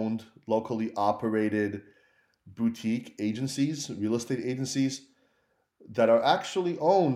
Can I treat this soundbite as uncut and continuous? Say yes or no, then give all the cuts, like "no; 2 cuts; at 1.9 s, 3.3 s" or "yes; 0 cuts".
yes; 0 cuts